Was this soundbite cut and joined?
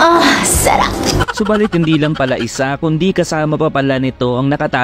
yes; 1 cut; at 1.3 s

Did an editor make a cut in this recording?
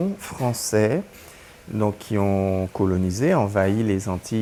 no; 0 cuts

